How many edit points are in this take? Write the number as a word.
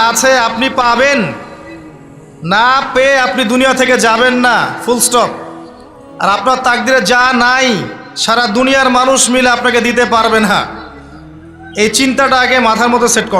zero